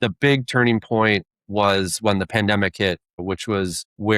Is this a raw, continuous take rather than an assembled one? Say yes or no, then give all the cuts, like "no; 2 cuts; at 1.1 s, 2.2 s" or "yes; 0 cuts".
no; 2 cuts; at 1.3 s, 3.4 s